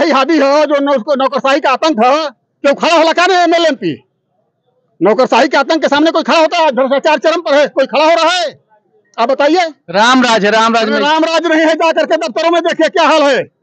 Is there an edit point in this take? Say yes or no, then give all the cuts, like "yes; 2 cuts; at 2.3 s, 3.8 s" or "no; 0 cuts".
no; 0 cuts